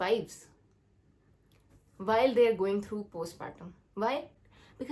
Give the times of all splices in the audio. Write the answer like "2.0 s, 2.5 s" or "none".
none